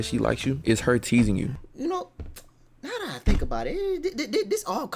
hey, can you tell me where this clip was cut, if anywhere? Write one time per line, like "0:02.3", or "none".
0:01.6